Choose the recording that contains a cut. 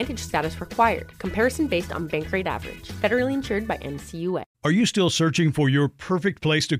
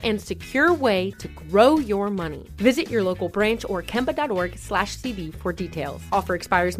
first; 1 cut; at 4.5 s

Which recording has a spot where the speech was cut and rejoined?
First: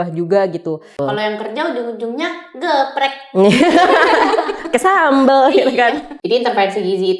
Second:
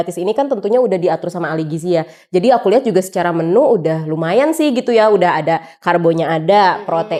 first; 2 cuts; at 1.0 s, 6.1 s

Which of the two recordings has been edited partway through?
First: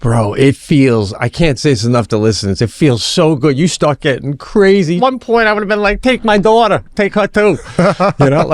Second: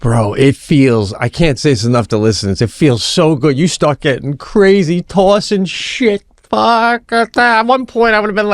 first; 1 cut; at 5.0 s

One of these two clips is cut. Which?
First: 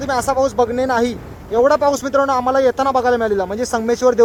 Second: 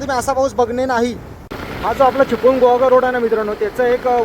second; 1 cut; at 1.3 s

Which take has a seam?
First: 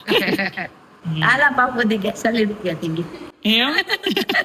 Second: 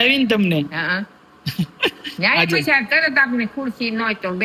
first; 1 cut; at 1.0 s

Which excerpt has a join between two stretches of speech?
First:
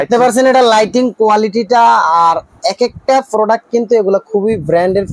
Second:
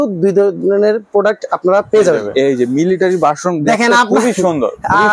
second; 1 cut; at 2.3 s

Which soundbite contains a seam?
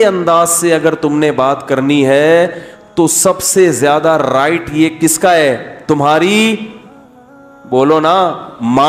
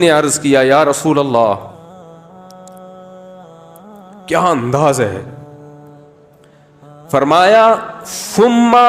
second; 4 cuts; at 1.7 s, 4.3 s, 5.3 s, 7.1 s

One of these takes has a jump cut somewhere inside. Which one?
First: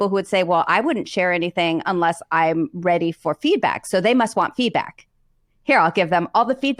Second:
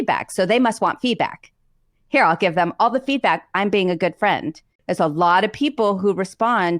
second; 1 cut; at 4.8 s

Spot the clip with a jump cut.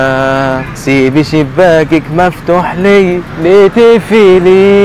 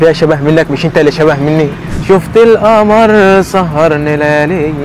second; 1 cut; at 1.9 s

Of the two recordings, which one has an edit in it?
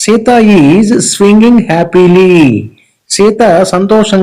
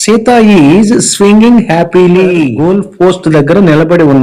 second; 1 cut; at 2.5 s

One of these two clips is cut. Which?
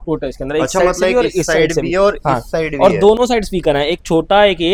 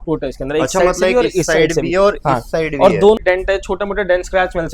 second; 1 cut; at 3.2 s

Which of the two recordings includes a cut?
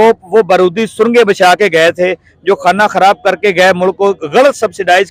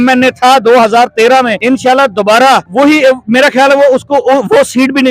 second; 2 cuts; at 1.6 s, 2.7 s

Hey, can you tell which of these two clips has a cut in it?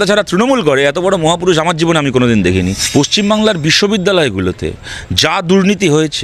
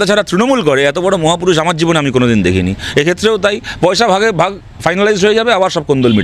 first; 1 cut; at 2.8 s

